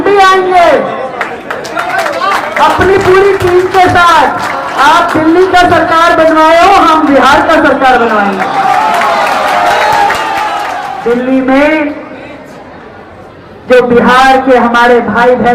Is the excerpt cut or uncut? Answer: cut